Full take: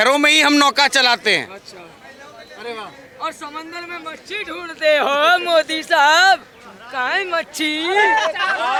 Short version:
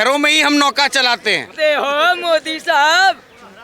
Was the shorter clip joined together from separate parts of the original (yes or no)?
yes